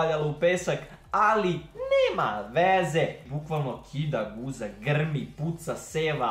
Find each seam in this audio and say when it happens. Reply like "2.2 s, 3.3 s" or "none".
3.3 s